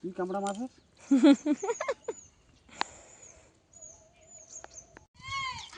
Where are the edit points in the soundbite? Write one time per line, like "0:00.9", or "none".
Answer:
none